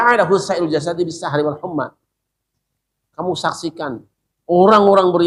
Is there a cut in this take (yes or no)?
no